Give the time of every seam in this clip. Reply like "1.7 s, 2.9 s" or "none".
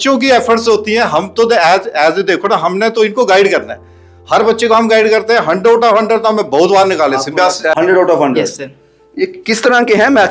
7.7 s